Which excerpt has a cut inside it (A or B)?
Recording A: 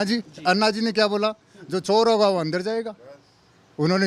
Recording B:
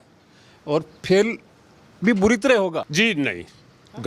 B